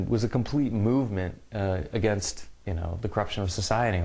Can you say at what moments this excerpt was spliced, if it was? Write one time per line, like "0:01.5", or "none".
0:01.3